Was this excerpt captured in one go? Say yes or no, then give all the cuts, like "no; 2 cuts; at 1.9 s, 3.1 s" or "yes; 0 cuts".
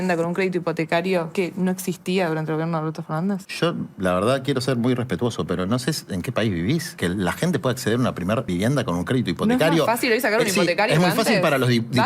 no; 4 cuts; at 1.3 s, 3.5 s, 6.9 s, 8.5 s